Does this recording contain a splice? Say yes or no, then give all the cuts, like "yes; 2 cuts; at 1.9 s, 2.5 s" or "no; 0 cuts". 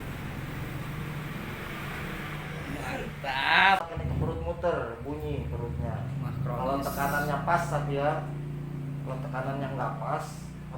yes; 1 cut; at 3.9 s